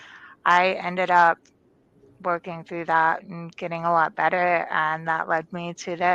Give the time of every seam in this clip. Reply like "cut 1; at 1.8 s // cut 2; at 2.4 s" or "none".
none